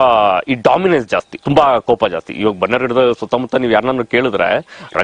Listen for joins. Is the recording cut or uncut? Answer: uncut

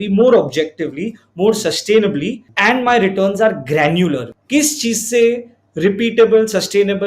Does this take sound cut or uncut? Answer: cut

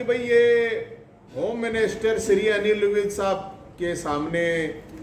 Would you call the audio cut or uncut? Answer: uncut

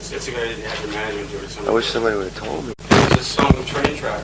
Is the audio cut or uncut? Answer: uncut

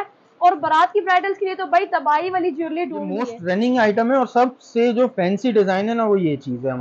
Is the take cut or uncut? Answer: cut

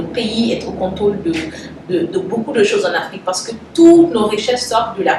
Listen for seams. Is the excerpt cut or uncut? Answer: uncut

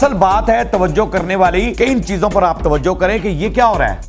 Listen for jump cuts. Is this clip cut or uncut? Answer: cut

